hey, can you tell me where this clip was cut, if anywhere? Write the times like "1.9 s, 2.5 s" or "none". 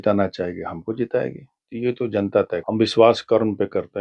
2.6 s